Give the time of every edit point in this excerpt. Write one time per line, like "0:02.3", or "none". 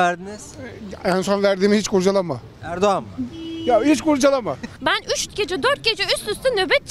0:04.8